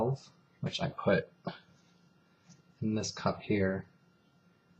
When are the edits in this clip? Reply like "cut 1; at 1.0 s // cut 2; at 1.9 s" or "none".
cut 1; at 1.3 s

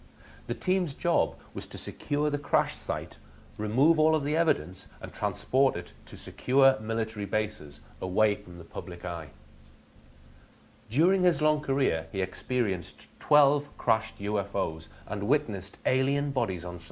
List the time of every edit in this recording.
cut 1; at 5.2 s

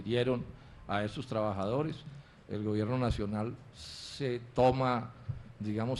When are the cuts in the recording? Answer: cut 1; at 3.5 s

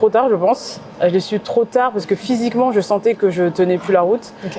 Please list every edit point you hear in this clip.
none

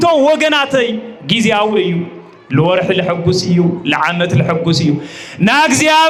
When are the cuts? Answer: none

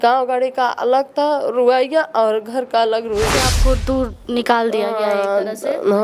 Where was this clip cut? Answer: cut 1; at 3.5 s

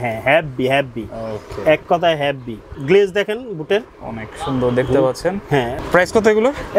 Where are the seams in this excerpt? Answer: cut 1; at 2.7 s // cut 2; at 5.7 s

